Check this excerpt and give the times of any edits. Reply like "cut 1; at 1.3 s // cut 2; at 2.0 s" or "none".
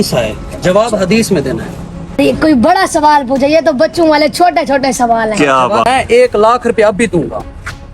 cut 1; at 2.2 s // cut 2; at 5.9 s

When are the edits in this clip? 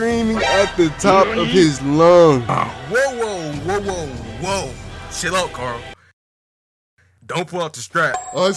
cut 1; at 2.5 s

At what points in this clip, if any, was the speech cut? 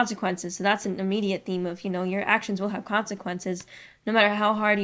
none

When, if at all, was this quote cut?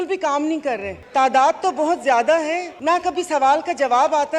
cut 1; at 0.9 s // cut 2; at 2.7 s

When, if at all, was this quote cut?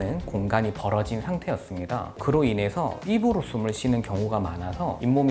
cut 1; at 2.2 s

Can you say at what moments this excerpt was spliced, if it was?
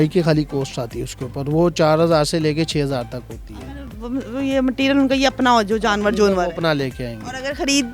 none

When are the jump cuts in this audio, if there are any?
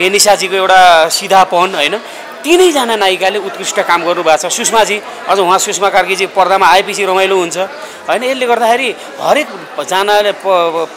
none

